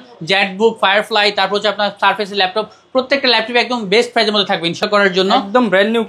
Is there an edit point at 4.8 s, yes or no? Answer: yes